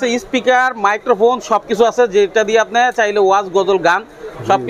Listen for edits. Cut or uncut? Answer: uncut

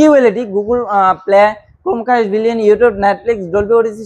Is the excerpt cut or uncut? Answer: uncut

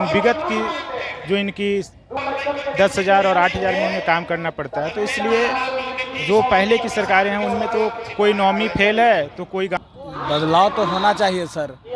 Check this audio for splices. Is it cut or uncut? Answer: cut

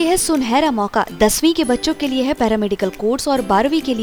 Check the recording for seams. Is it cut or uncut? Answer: uncut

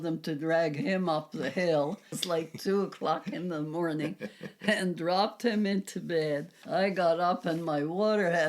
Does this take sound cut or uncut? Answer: cut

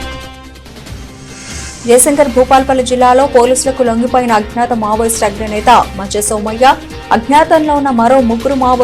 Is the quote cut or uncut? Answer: cut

